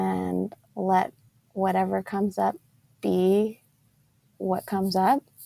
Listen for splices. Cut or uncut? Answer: uncut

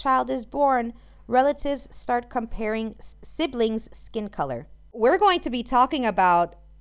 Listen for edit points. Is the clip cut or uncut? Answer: cut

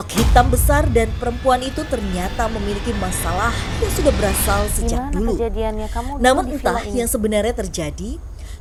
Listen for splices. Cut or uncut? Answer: uncut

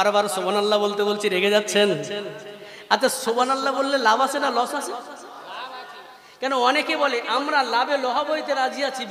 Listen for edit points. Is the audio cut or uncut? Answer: uncut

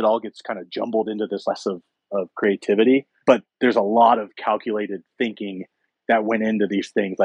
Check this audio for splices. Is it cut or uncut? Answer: cut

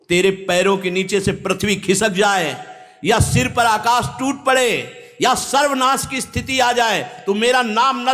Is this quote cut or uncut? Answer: uncut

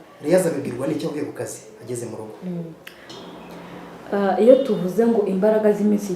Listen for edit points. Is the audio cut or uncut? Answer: cut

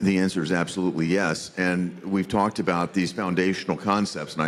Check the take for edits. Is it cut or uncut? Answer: uncut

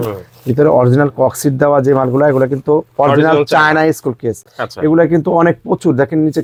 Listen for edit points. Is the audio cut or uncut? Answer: uncut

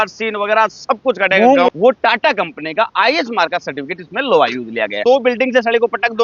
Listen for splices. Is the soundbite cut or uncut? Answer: cut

